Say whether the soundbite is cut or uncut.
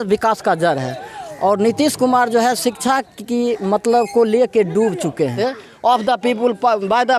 cut